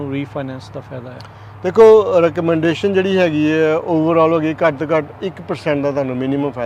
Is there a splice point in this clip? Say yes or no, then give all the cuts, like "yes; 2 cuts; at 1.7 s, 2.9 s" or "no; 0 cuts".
no; 0 cuts